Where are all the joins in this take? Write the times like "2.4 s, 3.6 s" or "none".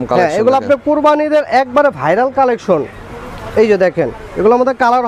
none